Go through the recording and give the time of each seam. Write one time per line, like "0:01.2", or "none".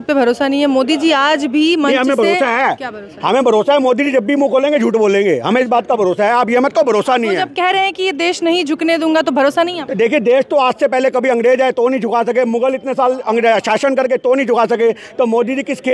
none